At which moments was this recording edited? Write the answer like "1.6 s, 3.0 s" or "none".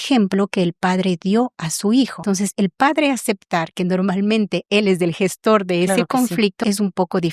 2.2 s, 6.6 s

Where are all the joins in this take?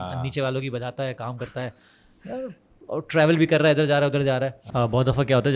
4.6 s

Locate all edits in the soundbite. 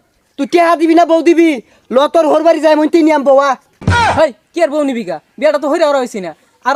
none

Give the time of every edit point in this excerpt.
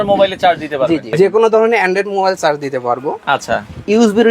1.1 s

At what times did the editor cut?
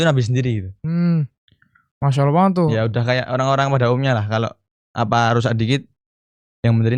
none

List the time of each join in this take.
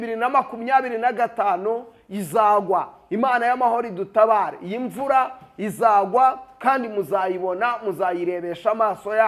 none

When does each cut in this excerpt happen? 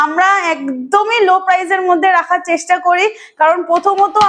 none

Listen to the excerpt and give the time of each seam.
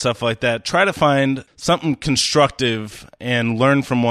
1.5 s

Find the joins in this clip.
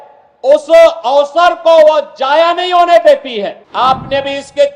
3.6 s

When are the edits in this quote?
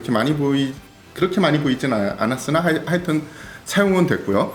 none

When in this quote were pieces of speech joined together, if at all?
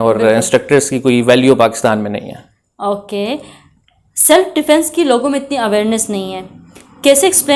none

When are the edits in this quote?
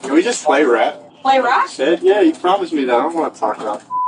1.1 s

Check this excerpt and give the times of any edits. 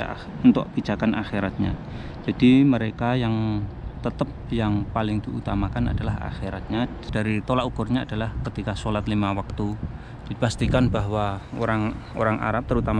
7.1 s

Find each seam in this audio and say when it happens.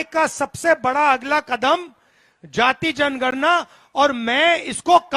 none

